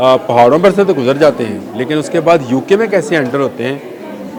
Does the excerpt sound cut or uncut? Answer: uncut